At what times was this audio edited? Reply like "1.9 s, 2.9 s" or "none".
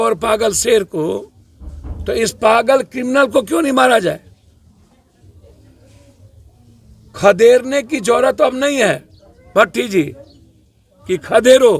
none